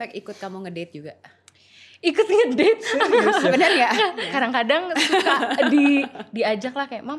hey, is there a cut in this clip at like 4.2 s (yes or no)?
yes